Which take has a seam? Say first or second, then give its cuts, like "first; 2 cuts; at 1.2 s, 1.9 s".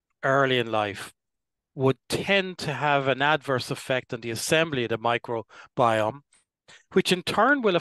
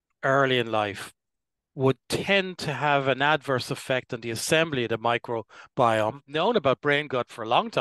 second; 1 cut; at 6.3 s